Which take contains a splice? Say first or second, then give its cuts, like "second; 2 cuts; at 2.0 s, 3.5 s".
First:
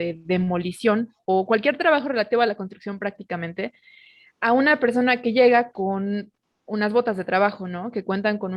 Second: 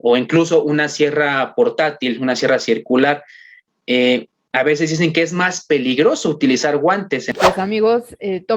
second; 1 cut; at 7.3 s